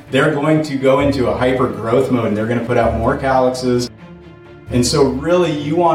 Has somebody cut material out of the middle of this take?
yes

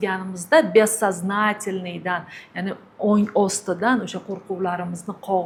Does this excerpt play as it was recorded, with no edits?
yes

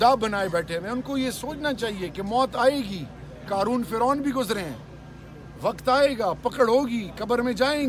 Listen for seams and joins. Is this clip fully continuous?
yes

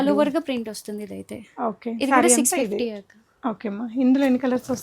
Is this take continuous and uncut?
yes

